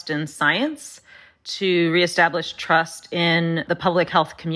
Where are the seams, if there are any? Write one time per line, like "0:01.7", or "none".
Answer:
0:03.6